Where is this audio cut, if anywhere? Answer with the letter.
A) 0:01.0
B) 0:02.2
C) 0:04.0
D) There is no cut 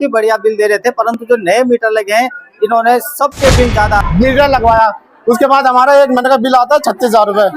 C